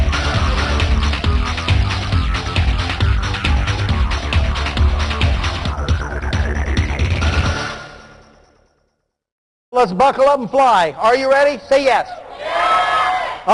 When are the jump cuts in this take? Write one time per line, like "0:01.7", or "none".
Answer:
0:02.8